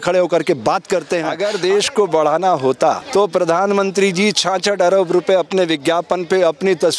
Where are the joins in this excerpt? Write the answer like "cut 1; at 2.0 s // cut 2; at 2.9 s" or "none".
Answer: cut 1; at 1.3 s // cut 2; at 3.0 s